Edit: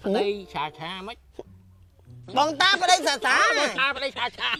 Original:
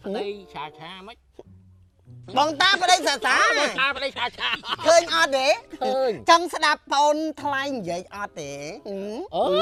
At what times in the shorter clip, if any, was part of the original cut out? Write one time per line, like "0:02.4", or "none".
none